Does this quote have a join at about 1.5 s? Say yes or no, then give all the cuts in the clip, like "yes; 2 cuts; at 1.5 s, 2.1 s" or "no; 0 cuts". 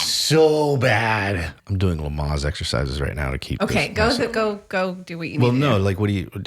yes; 1 cut; at 1.5 s